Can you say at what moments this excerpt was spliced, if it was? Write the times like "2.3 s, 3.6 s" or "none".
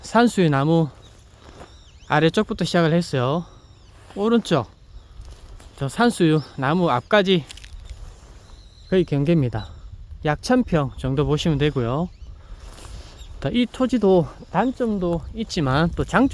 none